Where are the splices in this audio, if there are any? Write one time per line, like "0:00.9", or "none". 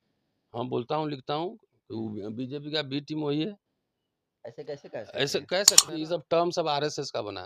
0:05.8